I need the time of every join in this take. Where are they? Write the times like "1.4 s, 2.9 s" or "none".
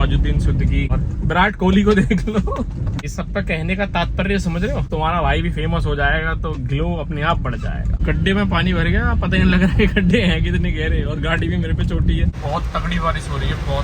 0.9 s, 3.0 s, 4.9 s, 8.0 s, 12.4 s